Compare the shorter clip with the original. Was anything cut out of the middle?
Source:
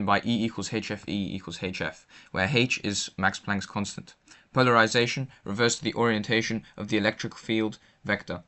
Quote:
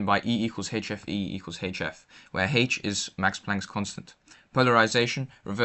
no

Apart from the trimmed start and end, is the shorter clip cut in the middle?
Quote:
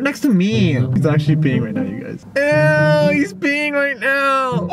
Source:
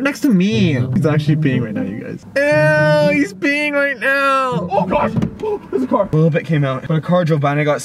no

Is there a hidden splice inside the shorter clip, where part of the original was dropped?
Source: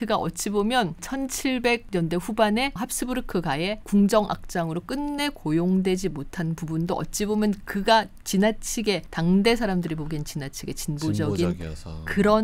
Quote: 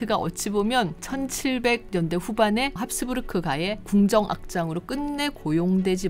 no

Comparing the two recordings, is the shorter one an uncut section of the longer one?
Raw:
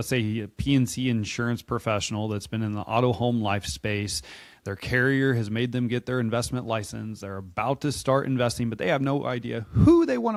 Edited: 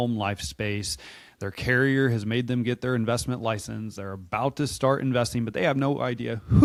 yes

